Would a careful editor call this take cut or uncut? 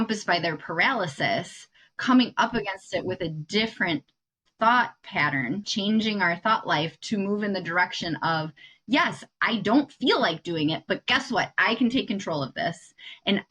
cut